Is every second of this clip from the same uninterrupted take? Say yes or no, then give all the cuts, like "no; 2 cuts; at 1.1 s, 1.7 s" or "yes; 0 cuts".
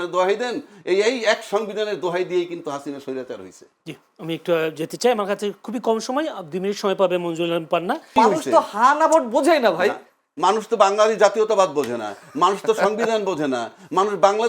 no; 1 cut; at 8.1 s